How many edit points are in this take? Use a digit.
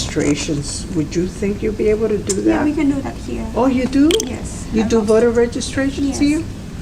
0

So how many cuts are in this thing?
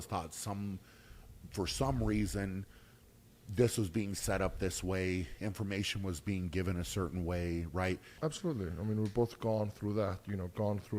1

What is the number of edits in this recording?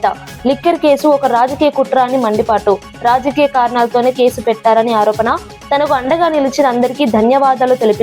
0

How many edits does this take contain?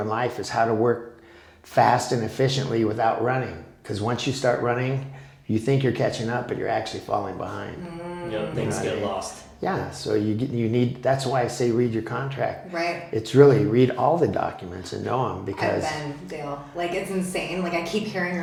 0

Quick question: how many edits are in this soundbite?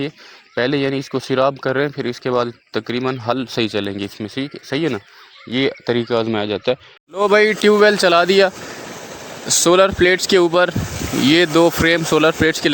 1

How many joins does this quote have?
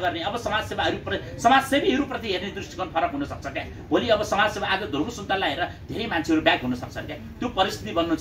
0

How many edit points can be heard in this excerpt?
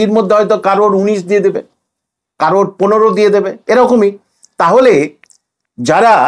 0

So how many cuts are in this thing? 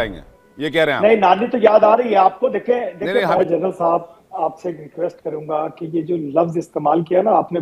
1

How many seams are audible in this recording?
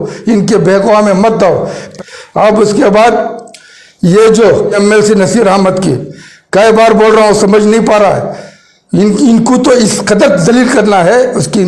2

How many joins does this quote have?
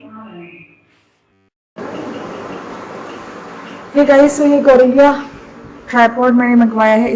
1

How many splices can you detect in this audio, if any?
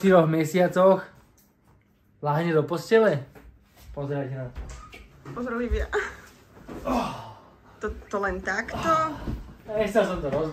0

